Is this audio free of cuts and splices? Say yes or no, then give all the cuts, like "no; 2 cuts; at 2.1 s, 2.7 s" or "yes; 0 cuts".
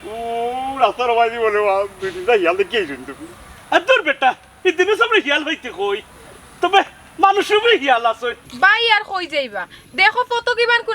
no; 1 cut; at 8.4 s